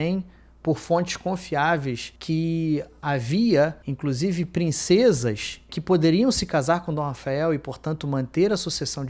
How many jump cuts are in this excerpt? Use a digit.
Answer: 0